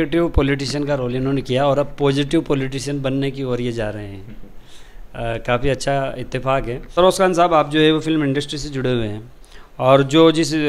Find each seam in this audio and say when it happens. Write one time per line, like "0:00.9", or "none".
none